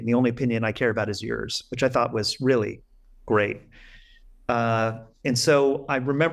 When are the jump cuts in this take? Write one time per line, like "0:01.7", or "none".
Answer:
none